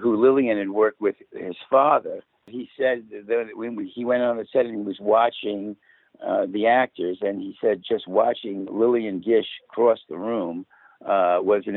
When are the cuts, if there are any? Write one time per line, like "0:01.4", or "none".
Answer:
0:02.6